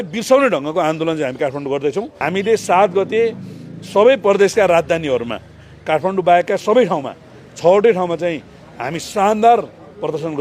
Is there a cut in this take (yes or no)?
yes